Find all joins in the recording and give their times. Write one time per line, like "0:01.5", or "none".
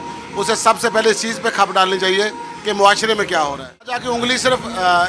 0:04.0